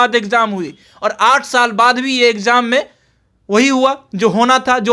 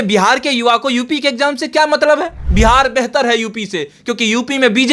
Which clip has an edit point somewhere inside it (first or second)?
second